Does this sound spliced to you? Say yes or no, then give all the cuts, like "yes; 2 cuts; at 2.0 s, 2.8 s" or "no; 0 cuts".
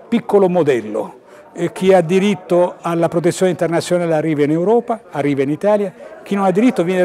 no; 0 cuts